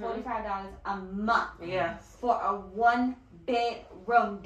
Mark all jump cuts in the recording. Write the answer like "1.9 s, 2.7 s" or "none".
none